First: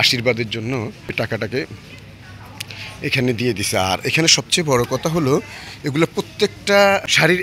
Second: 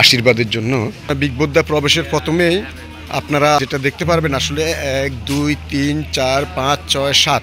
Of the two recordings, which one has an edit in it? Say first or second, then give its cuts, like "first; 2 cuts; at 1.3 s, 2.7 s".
second; 2 cuts; at 1.0 s, 3.6 s